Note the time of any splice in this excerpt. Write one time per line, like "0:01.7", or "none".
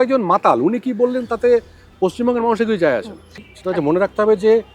0:03.4